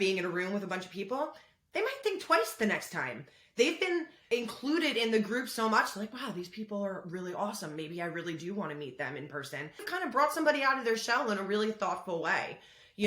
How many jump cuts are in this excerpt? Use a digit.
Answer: 2